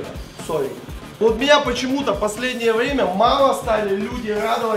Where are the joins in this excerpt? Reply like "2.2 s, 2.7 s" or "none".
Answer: 1.2 s